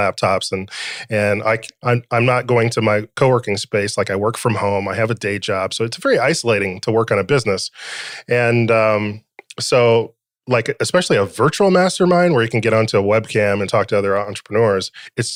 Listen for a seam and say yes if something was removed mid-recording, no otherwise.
no